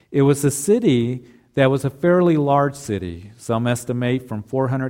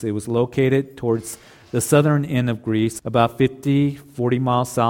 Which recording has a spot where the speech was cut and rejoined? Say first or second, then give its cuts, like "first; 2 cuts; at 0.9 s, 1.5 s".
second; 1 cut; at 3.0 s